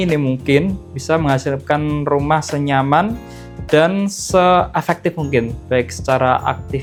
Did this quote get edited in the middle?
no; 0 cuts

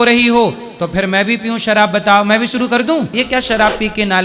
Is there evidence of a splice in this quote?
yes; 1 cut; at 3.1 s

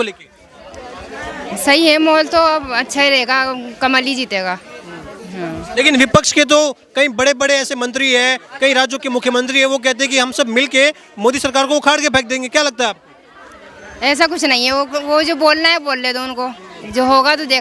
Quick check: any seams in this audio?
no; 0 cuts

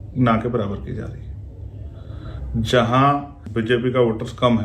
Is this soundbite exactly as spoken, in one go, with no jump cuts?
no; 1 cut; at 3.4 s

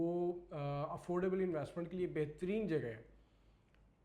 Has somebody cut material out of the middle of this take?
no; 0 cuts

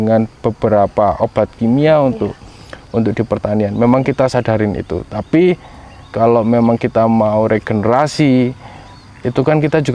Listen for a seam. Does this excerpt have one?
no; 0 cuts

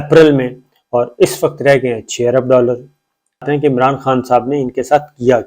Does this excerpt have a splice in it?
yes; 1 cut; at 3.4 s

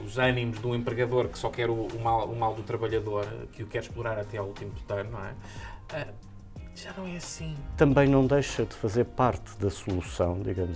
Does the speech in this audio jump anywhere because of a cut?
yes; 1 cut; at 7.6 s

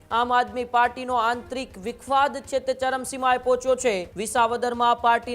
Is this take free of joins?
no; 1 cut; at 4.1 s

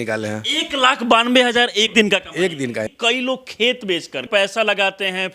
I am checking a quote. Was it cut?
yes; 3 cuts; at 1.9 s, 2.9 s, 4.3 s

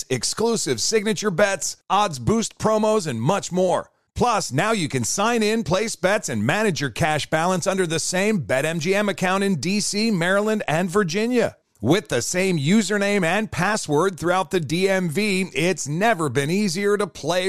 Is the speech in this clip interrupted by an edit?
no; 0 cuts

